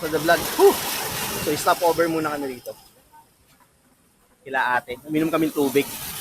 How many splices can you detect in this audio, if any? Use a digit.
0